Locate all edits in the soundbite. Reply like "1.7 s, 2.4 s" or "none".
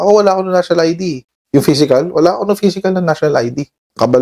none